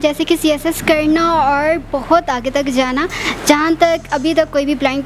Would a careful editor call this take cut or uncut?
uncut